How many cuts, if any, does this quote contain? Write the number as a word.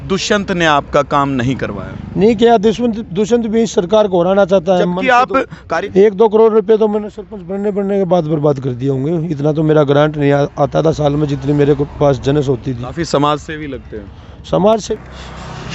two